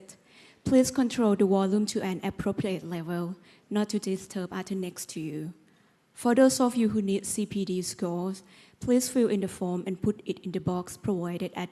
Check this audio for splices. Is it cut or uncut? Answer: cut